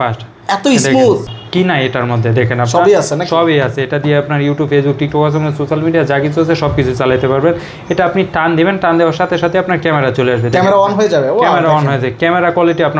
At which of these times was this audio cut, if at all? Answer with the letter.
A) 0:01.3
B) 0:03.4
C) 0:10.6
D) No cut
A